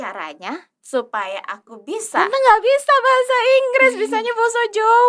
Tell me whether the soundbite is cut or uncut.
cut